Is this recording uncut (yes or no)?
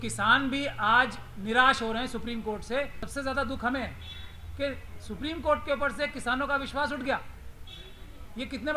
no